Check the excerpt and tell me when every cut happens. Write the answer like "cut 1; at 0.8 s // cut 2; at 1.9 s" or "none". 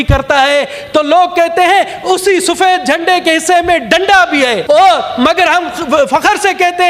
cut 1; at 4.6 s